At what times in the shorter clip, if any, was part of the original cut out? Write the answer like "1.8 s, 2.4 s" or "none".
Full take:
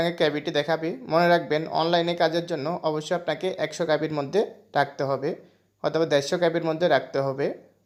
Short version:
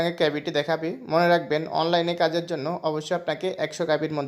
none

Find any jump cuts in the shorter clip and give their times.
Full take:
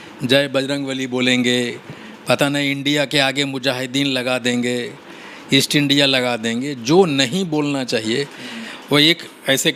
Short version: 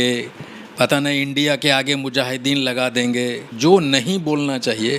3.5 s

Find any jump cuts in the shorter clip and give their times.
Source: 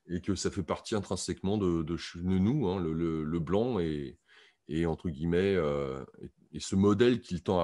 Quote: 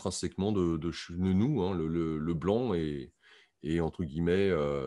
none

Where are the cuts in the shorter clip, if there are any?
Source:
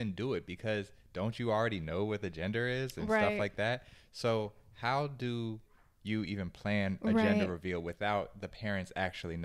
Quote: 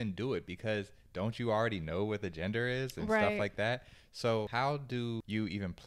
4.8 s

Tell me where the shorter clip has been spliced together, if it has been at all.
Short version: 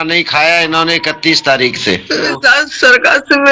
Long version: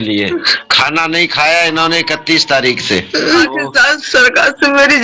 2.3 s

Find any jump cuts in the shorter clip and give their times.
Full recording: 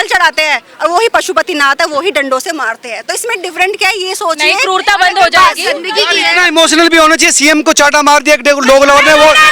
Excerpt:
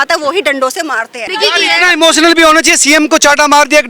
1.3 s

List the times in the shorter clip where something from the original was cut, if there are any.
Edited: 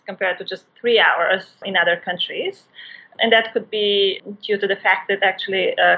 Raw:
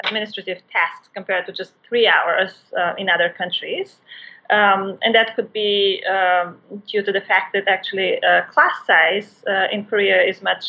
1.6 s, 3.1 s, 4.2 s

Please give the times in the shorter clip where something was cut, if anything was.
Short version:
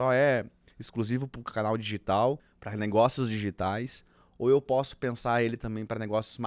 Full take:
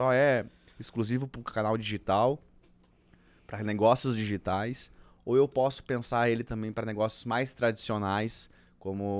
2.6 s

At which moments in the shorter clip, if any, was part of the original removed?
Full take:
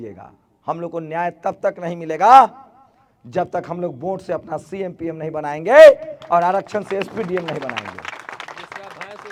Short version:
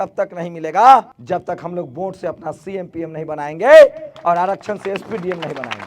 1.2 s

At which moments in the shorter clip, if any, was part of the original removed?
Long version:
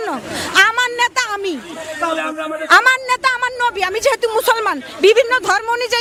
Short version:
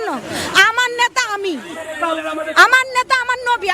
2.2 s

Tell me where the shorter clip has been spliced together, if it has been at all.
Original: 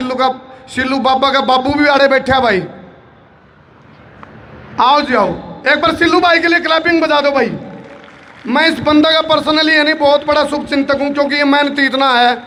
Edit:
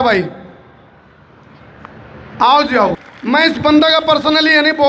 3.1 s

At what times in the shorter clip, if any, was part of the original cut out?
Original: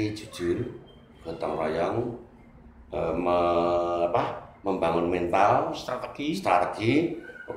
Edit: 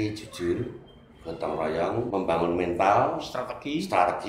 2.1 s

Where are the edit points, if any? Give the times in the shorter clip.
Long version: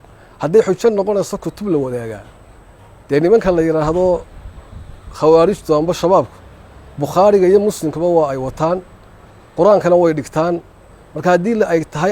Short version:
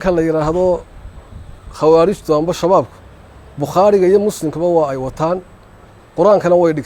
none

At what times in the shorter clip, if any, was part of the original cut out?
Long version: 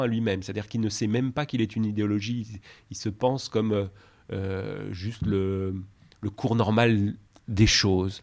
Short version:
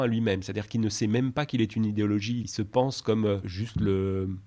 2.5 s, 3.6 s

